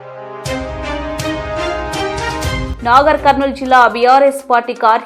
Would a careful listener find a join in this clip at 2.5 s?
yes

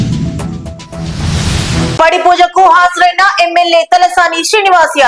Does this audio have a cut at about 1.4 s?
yes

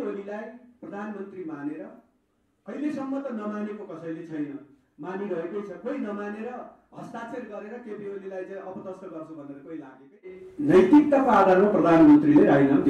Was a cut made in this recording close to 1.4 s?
no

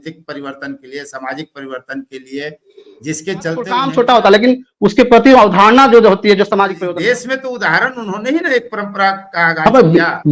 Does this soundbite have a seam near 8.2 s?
no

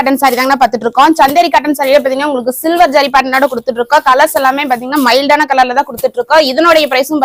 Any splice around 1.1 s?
no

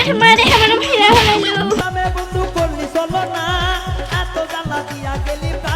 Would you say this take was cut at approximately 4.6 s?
no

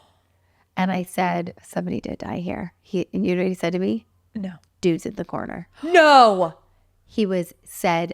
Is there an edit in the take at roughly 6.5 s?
no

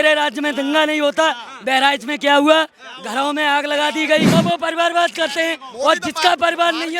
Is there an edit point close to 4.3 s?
yes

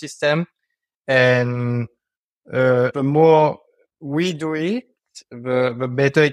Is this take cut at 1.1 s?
no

